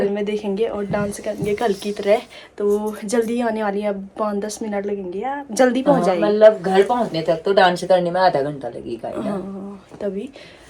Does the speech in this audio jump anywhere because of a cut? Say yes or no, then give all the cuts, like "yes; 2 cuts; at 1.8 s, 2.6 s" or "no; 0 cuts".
no; 0 cuts